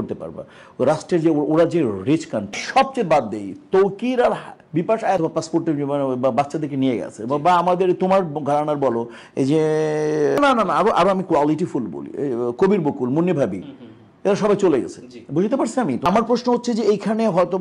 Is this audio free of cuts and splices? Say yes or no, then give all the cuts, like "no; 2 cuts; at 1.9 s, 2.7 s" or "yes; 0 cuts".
yes; 0 cuts